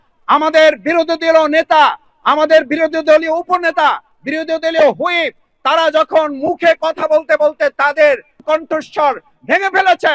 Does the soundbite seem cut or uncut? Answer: cut